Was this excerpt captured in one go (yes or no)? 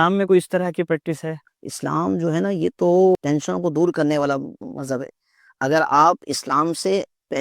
no